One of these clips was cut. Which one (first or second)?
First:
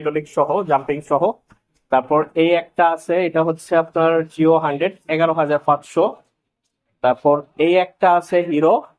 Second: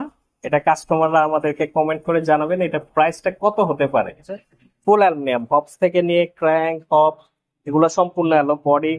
second